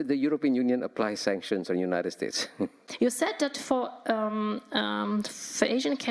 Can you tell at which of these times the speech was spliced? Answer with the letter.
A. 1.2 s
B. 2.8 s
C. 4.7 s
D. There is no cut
B